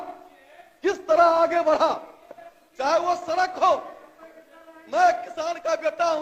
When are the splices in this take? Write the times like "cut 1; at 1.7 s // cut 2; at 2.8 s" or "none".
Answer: none